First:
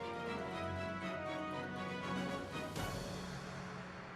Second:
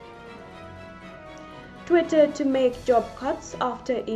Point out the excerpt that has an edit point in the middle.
second; 1 cut; at 1.9 s

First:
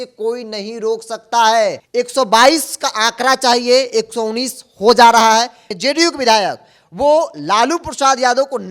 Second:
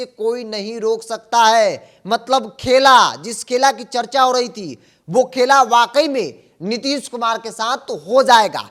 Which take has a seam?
first; 2 cuts; at 1.8 s, 5.6 s

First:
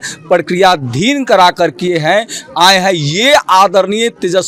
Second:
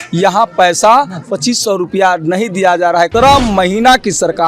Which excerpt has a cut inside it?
second; 1 cut; at 3.1 s

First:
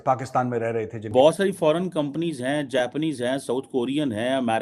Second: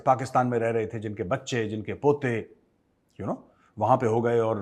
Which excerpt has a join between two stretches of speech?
first; 1 cut; at 1.1 s

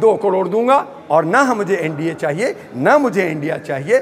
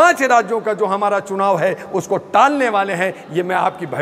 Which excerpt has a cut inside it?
first; 1 cut; at 1.0 s

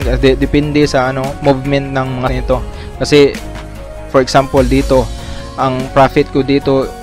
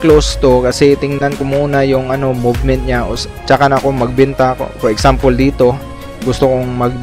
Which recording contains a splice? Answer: first; 1 cut; at 2.3 s

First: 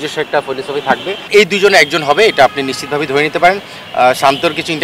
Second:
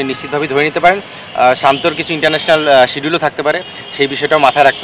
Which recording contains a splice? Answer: first; 1 cut; at 1.3 s

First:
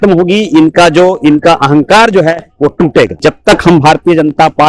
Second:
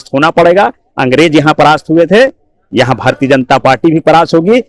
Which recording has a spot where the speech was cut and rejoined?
first; 1 cut; at 3.2 s

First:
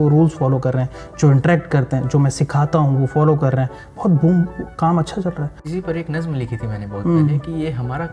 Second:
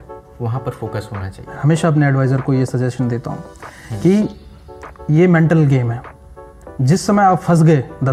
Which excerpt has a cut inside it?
first; 1 cut; at 5.6 s

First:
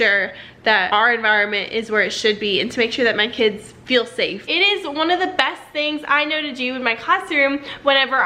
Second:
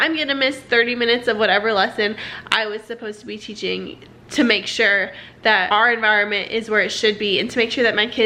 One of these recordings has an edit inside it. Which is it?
first; 1 cut; at 4.4 s

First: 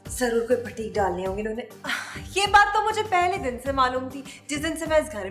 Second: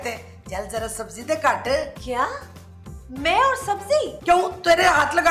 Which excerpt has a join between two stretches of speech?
second; 1 cut; at 2.0 s

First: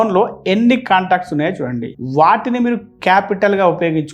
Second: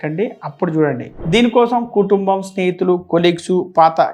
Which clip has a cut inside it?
second; 1 cut; at 1.1 s

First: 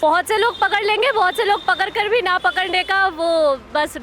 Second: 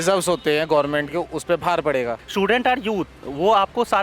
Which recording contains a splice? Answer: second; 1 cut; at 2.2 s

